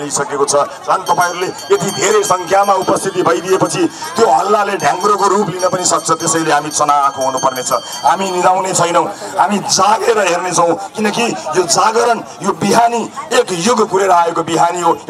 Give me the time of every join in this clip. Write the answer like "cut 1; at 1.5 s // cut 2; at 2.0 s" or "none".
none